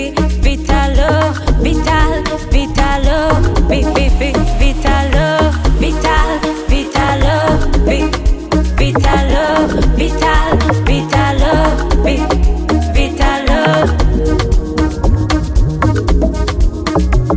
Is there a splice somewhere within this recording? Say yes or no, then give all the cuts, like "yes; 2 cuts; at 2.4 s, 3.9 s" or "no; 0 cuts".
no; 0 cuts